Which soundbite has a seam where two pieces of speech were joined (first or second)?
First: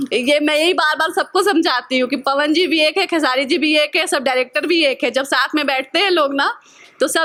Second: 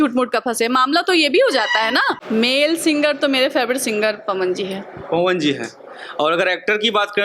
second